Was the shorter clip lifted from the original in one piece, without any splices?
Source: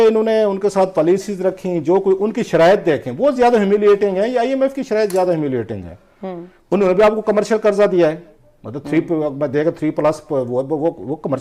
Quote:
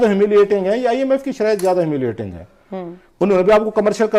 yes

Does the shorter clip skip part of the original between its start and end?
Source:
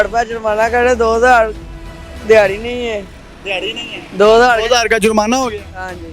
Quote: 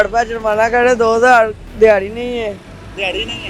yes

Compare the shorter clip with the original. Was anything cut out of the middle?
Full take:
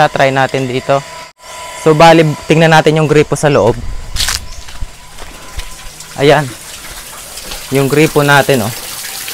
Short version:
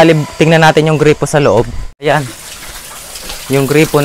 yes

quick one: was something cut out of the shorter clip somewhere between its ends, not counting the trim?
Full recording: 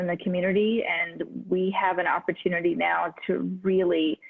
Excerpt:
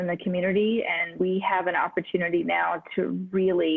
yes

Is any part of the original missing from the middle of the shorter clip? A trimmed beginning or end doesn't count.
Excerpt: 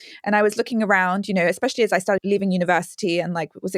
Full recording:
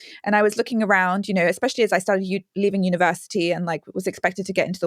yes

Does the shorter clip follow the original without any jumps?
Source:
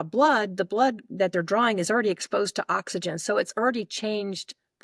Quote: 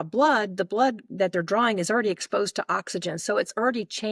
yes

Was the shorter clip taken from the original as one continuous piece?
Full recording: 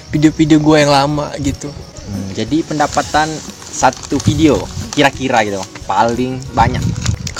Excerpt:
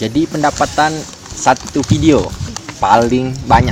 no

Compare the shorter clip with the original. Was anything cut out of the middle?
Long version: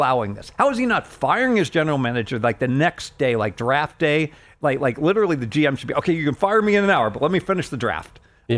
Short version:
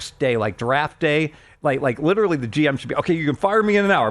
no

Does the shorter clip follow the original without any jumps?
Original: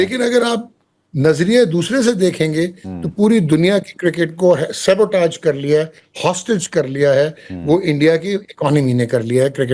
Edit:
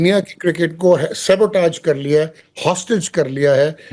yes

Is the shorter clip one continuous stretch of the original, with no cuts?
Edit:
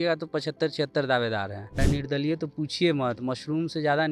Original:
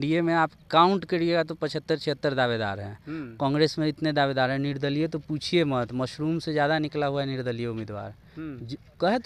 no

